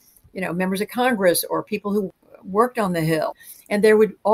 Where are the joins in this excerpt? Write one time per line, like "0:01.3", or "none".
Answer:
0:02.1
0:03.4